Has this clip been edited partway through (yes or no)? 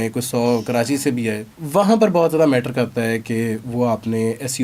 yes